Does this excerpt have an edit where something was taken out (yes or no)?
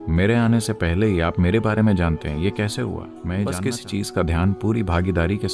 yes